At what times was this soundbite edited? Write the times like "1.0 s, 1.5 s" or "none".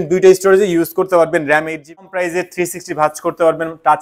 2.0 s

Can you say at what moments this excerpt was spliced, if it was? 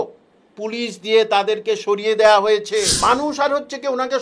2.9 s

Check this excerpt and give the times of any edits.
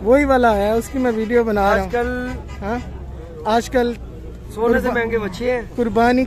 none

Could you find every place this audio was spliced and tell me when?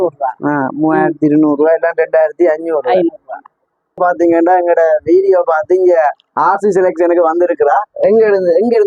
4.0 s

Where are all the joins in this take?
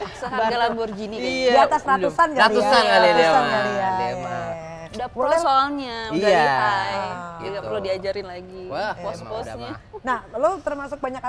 none

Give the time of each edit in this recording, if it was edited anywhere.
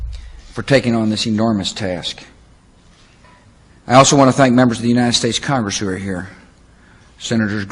none

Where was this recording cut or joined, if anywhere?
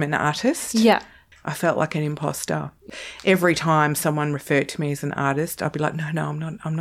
1.3 s, 2.8 s

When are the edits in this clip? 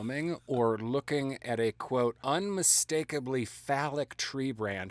2.2 s

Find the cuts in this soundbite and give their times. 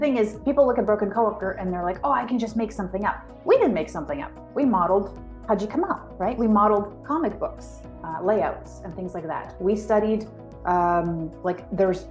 none

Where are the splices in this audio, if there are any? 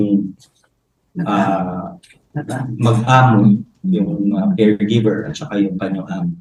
none

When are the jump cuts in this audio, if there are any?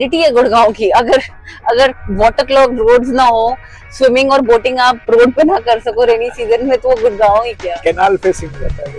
none

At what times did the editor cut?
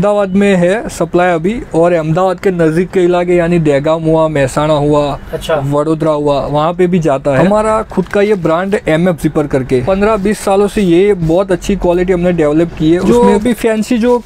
7.4 s, 9.8 s, 13.0 s

